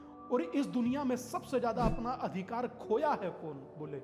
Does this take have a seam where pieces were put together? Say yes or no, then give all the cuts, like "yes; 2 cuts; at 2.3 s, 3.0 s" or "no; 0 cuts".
no; 0 cuts